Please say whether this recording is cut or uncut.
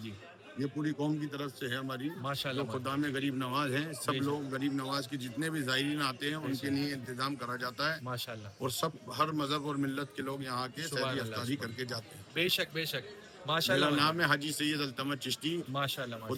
uncut